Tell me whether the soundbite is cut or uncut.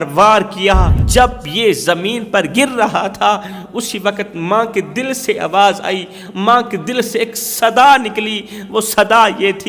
cut